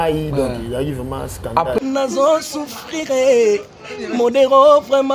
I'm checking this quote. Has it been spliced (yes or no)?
yes